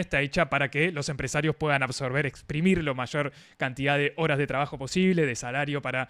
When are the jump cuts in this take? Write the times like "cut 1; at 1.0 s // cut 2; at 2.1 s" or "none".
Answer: none